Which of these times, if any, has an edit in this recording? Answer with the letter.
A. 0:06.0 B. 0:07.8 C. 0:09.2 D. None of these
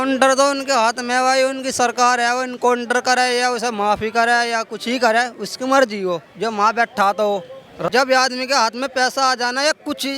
B